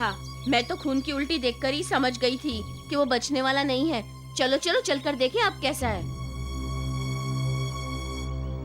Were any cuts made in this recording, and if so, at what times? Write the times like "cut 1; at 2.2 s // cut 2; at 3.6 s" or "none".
none